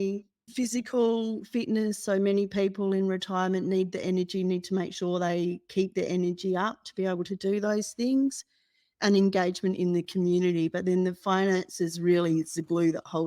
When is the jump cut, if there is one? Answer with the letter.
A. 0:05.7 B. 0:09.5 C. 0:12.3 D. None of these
D